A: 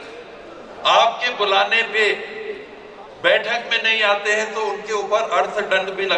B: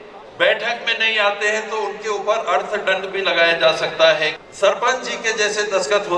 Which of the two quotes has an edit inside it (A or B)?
B